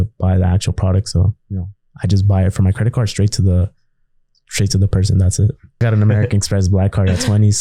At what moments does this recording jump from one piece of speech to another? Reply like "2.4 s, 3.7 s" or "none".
5.8 s